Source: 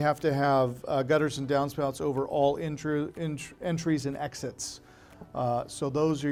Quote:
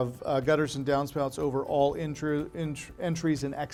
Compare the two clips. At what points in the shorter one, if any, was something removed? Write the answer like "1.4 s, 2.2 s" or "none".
none